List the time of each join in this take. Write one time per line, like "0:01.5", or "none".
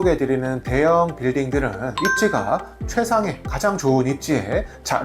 0:01.9